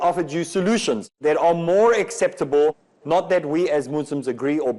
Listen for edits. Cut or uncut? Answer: cut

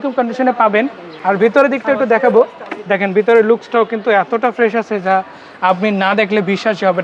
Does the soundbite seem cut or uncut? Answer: uncut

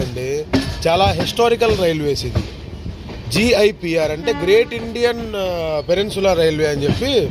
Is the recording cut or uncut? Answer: uncut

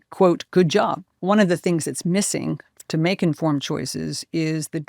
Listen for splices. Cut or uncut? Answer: cut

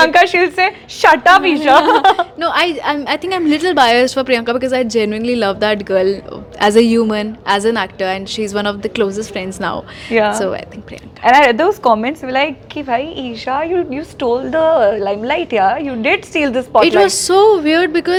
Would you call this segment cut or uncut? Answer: uncut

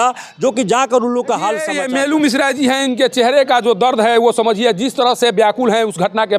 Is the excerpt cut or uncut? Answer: cut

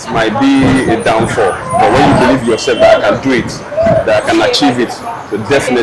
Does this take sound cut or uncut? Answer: uncut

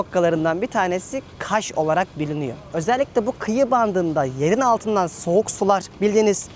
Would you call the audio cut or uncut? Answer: uncut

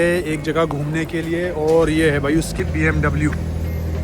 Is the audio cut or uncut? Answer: cut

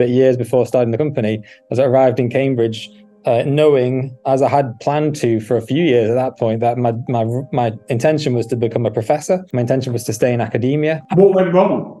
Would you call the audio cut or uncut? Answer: uncut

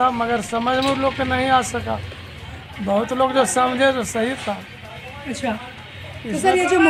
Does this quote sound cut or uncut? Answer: uncut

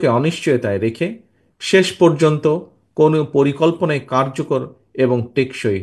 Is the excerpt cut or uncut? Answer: uncut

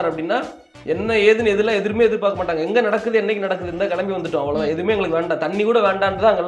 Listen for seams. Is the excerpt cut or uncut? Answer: uncut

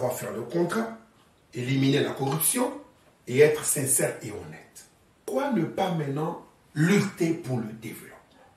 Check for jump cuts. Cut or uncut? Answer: cut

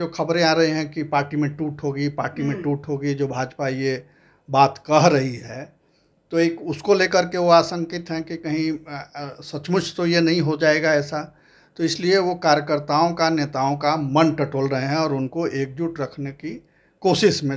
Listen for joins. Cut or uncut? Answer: uncut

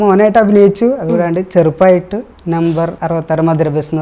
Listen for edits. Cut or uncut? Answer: cut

